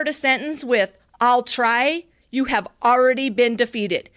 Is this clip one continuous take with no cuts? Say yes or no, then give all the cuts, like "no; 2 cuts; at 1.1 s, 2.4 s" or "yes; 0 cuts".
yes; 0 cuts